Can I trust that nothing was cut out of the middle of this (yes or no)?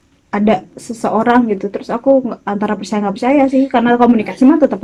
yes